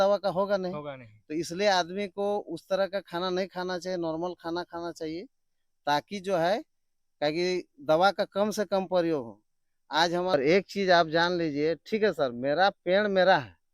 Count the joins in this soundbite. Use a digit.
1